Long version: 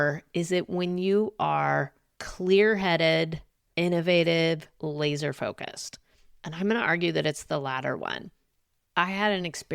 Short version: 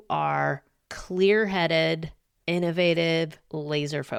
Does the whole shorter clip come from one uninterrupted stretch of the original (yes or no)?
yes